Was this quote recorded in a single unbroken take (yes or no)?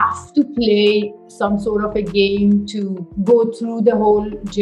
yes